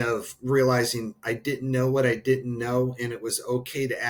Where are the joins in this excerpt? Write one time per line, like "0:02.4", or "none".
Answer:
none